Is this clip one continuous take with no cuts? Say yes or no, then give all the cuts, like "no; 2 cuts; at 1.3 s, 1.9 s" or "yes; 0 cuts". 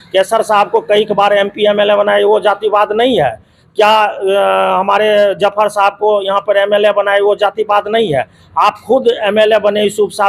yes; 0 cuts